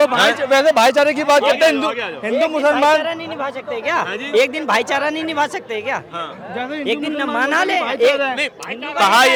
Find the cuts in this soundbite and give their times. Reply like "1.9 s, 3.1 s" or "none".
none